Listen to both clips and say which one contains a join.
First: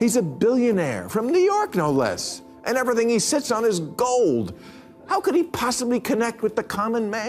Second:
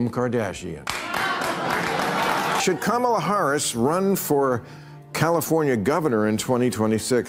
second; 1 cut; at 2.3 s

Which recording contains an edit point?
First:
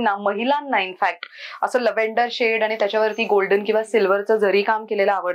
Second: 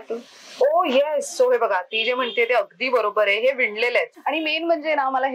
second; 1 cut; at 4.1 s

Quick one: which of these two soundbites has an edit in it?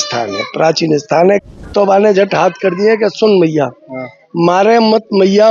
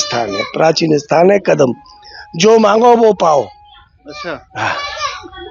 first; 1 cut; at 1.4 s

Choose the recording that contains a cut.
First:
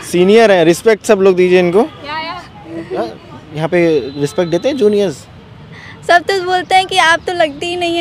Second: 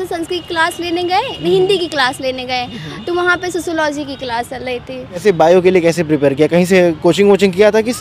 second; 1 cut; at 5.2 s

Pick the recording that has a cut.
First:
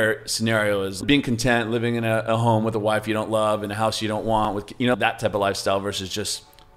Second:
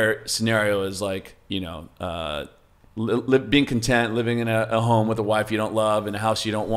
first; 2 cuts; at 1.0 s, 4.5 s

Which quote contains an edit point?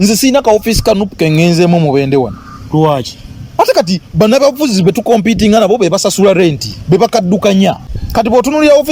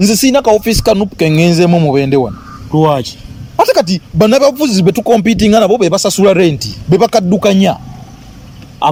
first; 1 cut; at 7.9 s

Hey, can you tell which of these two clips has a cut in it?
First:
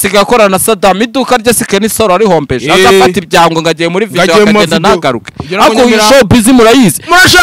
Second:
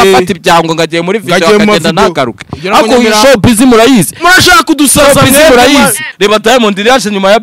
second; 1 cut; at 6.1 s

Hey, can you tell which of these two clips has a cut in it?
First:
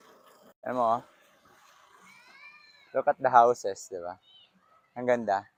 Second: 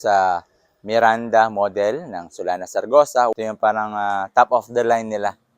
second; 1 cut; at 3.3 s

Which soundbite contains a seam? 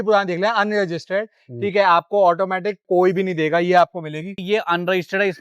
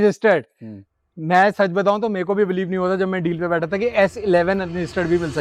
first; 2 cuts; at 2.8 s, 4.4 s

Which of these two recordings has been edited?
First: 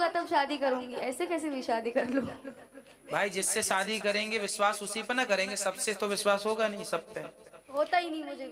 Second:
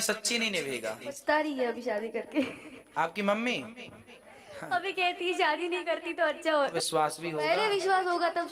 second; 2 cuts; at 1.1 s, 6.7 s

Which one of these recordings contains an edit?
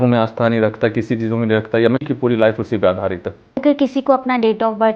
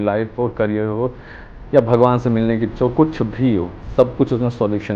first; 2 cuts; at 2.0 s, 3.6 s

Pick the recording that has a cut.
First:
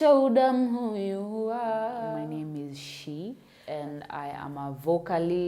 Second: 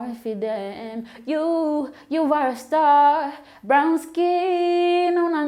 first; 2 cuts; at 2.2 s, 3.5 s

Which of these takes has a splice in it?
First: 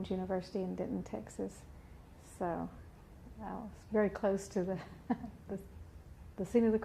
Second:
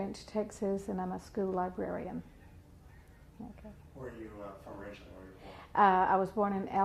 first; 1 cut; at 2.7 s

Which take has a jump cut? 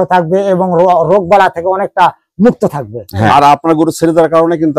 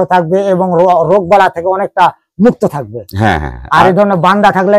first; 1 cut; at 3.3 s

